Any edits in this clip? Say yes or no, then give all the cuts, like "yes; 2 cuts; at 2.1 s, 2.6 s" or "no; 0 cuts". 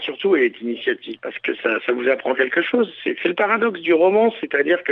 yes; 1 cut; at 1.1 s